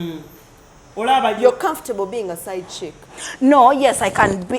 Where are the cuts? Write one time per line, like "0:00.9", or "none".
none